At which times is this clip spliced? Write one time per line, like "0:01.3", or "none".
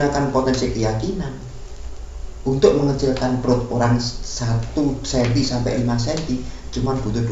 none